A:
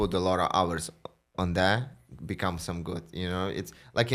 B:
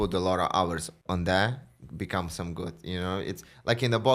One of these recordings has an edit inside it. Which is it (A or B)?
B